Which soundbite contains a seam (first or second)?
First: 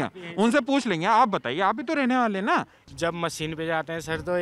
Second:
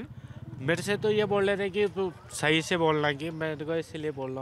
first